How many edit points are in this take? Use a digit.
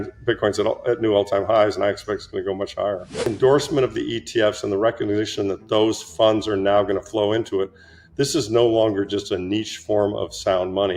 1